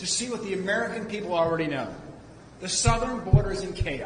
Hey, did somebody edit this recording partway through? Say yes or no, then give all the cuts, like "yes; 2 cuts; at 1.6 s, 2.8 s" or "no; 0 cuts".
no; 0 cuts